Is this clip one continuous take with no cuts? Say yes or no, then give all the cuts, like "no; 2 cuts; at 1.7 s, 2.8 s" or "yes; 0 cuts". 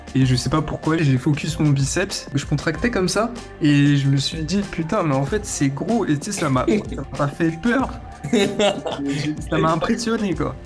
no; 2 cuts; at 1.0 s, 2.2 s